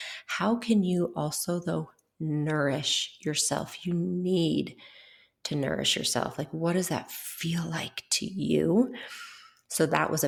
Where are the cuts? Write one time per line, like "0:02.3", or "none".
none